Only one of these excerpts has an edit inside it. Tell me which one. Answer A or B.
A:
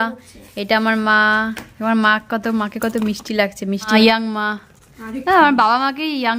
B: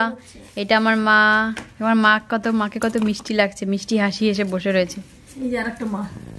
A